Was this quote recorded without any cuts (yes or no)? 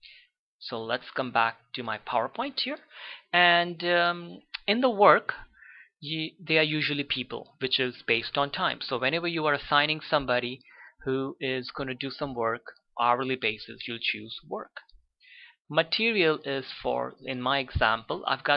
yes